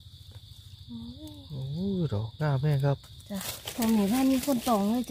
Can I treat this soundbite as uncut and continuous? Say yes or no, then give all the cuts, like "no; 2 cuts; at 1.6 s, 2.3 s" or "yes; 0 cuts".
no; 1 cut; at 3.6 s